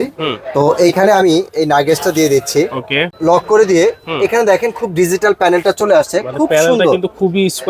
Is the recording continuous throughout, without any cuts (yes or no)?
no